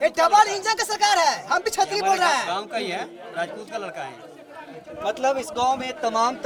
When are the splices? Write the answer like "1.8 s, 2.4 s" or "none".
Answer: none